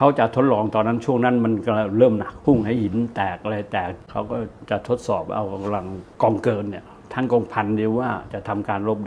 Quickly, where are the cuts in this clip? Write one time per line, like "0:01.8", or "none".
0:02.3
0:04.1
0:06.0